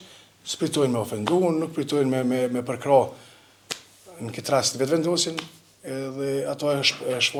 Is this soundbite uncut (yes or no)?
yes